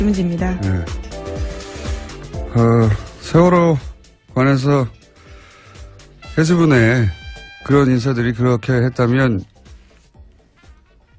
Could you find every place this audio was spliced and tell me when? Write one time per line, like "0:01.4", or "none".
0:03.1

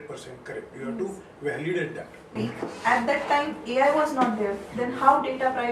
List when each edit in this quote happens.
0:02.3

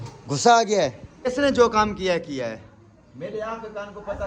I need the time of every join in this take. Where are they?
0:01.3

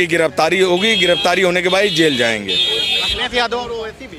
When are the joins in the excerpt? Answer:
none

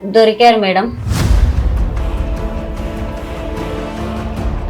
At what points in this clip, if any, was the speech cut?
0:01.0

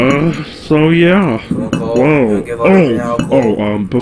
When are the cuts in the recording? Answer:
none

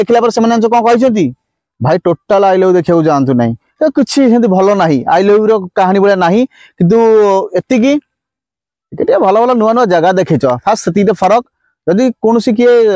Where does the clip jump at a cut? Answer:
0:03.7

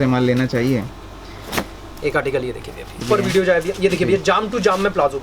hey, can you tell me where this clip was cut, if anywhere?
0:03.0

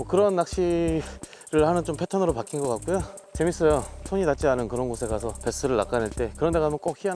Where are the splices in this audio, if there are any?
0:03.2
0:04.1
0:05.3

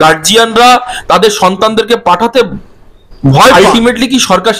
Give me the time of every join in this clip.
0:03.5

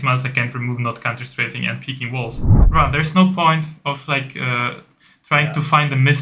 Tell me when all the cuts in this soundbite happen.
0:02.6

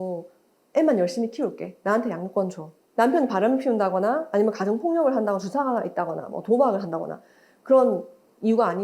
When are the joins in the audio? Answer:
0:02.8

